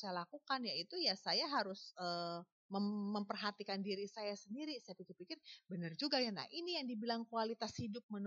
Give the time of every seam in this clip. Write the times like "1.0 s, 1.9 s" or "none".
none